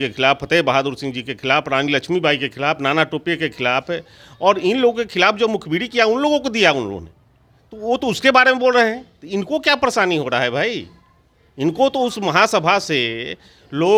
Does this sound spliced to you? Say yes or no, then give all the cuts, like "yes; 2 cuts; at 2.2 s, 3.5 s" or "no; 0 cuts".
no; 0 cuts